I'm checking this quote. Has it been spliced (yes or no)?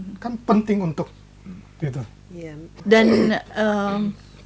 yes